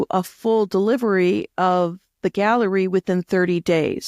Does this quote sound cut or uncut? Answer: uncut